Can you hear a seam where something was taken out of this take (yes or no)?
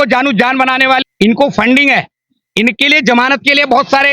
yes